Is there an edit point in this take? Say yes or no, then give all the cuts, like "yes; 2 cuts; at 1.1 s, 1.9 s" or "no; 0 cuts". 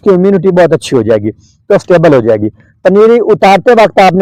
no; 0 cuts